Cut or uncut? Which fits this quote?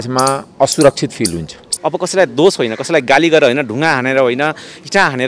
cut